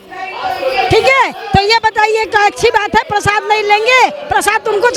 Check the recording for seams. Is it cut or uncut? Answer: uncut